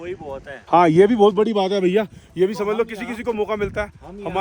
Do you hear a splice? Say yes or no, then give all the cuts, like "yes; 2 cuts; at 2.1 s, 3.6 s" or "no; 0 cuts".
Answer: no; 0 cuts